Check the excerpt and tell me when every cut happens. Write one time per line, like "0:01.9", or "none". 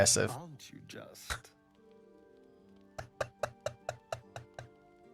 none